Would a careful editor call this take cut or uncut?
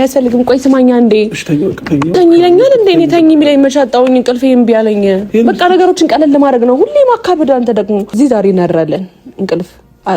cut